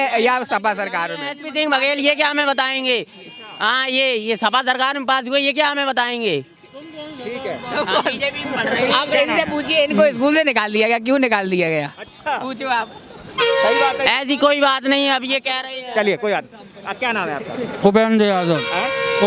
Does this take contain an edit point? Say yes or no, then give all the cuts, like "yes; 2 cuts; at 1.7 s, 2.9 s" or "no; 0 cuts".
no; 0 cuts